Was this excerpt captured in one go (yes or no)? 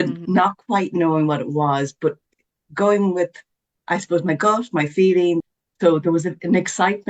no